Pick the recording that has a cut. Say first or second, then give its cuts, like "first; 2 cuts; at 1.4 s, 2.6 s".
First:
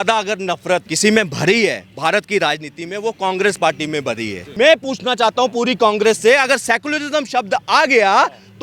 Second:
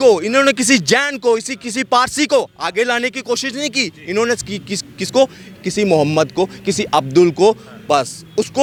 first; 2 cuts; at 0.9 s, 4.5 s